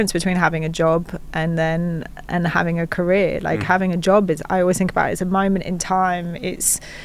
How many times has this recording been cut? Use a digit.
0